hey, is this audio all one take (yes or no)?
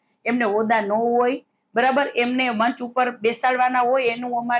yes